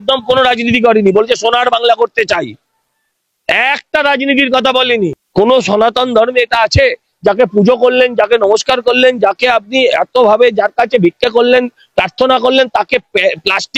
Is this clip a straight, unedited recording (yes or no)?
no